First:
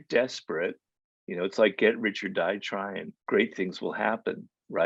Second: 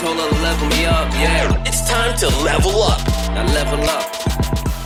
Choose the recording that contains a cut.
first; 1 cut; at 3.1 s

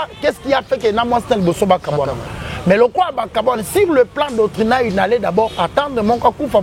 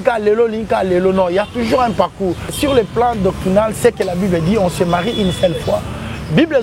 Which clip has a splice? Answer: second; 1 cut; at 2.5 s

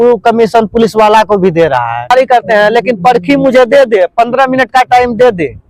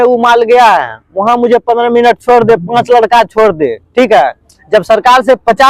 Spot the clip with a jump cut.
first; 1 cut; at 2.1 s

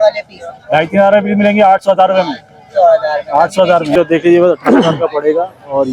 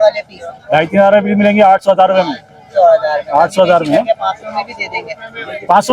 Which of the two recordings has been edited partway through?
first; 1 cut; at 3.9 s

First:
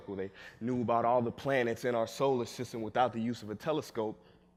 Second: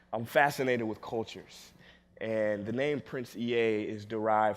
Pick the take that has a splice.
second; 1 cut; at 1.2 s

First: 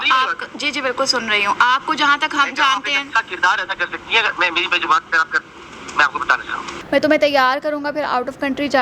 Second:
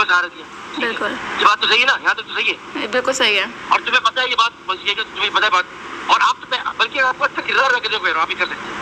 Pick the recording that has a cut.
first; 1 cut; at 6.7 s

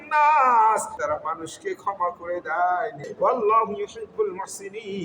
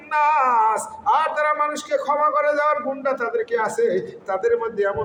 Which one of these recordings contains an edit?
first; 2 cuts; at 1.0 s, 3.1 s

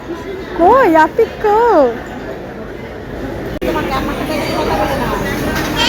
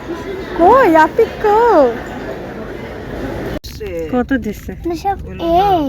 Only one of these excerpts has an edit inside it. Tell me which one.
second; 1 cut; at 3.6 s

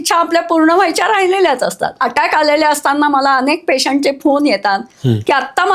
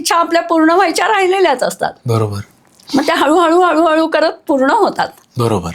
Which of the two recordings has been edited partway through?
first; 1 cut; at 2.0 s

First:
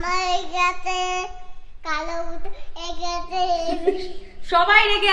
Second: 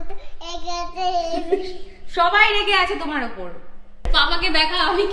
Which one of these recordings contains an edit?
second; 1 cut; at 4.1 s

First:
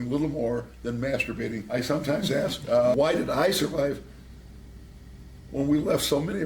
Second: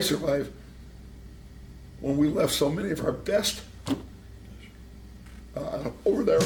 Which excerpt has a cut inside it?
first; 1 cut; at 1.7 s

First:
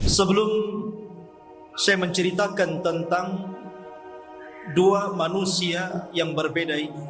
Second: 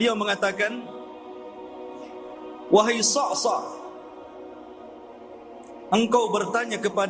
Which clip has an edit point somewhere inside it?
second; 4 cuts; at 1.1 s, 2.7 s, 3.8 s, 5.9 s

